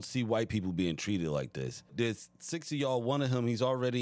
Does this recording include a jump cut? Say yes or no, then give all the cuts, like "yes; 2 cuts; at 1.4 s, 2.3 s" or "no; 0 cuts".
yes; 1 cut; at 1.8 s